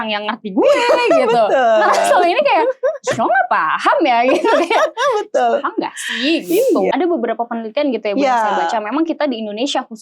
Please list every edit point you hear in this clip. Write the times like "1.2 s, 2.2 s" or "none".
6.9 s